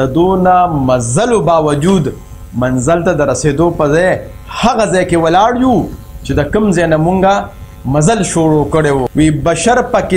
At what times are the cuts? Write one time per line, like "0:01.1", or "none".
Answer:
0:09.1